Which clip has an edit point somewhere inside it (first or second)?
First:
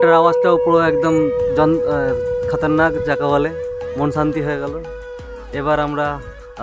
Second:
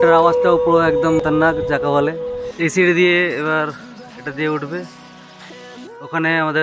second